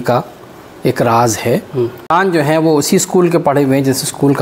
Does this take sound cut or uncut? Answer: cut